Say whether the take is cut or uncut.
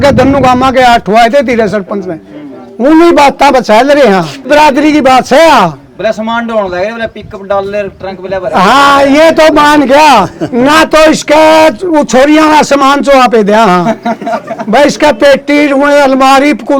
cut